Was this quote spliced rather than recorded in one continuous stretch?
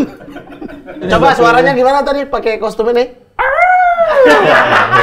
yes; 1 cut; at 1.1 s

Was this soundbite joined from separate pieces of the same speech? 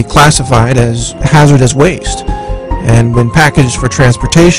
no; 0 cuts

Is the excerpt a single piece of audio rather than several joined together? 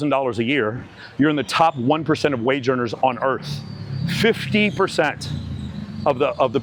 yes; 0 cuts

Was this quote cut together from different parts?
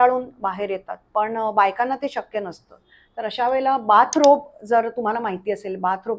no; 0 cuts

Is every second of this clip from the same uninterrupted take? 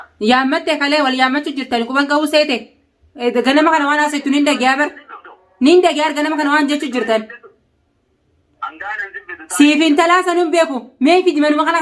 yes; 0 cuts

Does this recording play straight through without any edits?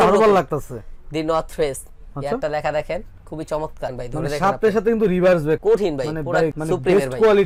yes; 0 cuts

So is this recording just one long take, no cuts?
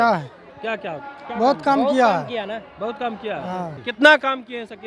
no; 1 cut; at 3.8 s

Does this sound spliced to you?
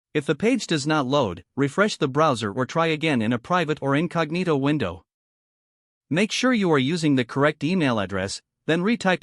no; 0 cuts

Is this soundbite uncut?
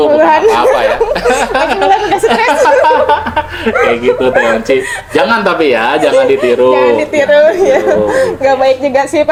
yes; 0 cuts

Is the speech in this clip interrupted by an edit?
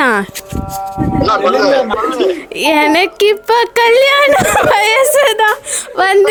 no; 0 cuts

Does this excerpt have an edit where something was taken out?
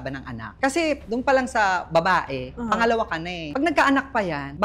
yes; 1 cut; at 1.0 s

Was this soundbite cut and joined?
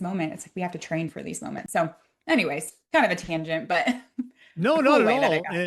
no; 0 cuts

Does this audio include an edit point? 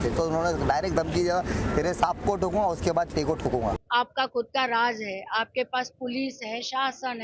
yes; 1 cut; at 3.8 s

